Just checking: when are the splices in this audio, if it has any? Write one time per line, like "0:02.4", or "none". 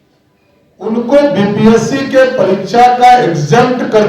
none